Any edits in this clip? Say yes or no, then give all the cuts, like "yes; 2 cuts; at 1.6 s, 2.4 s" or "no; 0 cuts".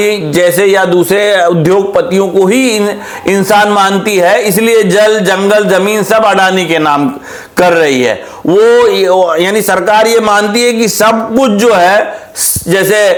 no; 0 cuts